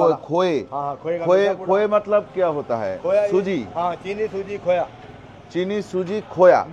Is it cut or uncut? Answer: uncut